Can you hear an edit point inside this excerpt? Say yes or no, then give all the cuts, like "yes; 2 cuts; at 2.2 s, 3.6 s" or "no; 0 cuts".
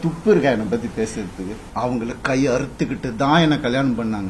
yes; 1 cut; at 1.6 s